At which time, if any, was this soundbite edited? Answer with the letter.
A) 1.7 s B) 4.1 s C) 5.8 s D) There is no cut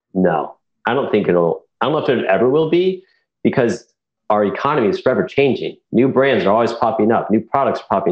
B